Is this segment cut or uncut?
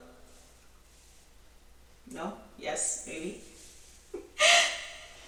uncut